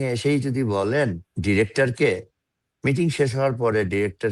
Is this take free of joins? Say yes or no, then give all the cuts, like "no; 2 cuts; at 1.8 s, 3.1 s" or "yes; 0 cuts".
no; 1 cut; at 1.3 s